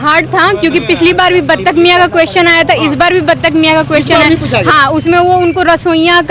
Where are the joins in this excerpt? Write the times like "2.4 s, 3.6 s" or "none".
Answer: none